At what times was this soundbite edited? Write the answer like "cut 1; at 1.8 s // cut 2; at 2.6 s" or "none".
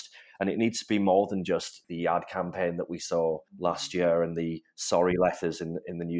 cut 1; at 3.5 s